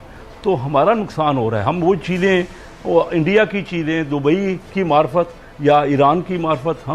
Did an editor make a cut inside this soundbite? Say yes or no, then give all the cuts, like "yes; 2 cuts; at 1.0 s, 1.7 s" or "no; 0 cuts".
no; 0 cuts